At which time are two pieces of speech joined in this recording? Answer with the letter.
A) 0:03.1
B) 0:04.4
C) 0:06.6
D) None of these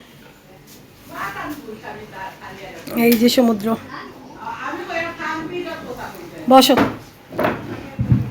D